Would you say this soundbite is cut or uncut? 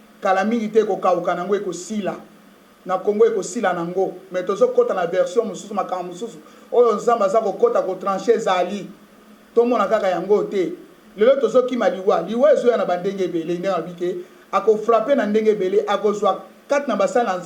uncut